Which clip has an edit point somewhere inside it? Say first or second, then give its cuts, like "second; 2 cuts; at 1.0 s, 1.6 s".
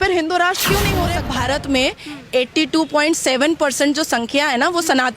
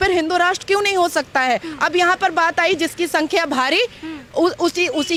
first; 1 cut; at 1.2 s